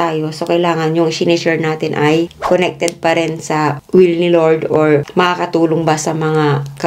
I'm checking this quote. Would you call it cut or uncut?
uncut